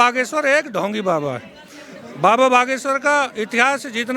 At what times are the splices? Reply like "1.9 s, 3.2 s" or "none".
none